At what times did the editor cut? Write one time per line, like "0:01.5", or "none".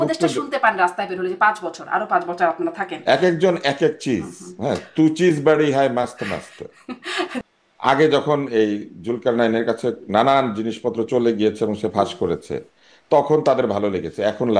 0:02.9
0:07.5

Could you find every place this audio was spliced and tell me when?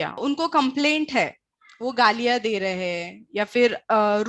none

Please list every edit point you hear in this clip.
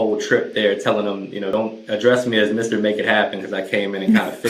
0:01.5

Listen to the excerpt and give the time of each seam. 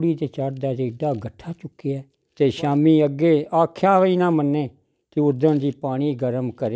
0:02.2

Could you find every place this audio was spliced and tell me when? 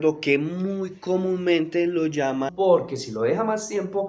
0:02.5

